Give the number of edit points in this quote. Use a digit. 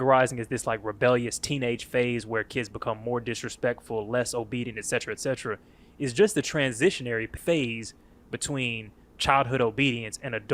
1